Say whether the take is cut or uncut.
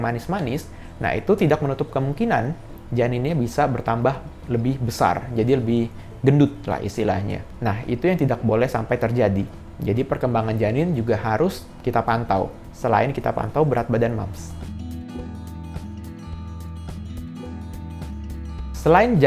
uncut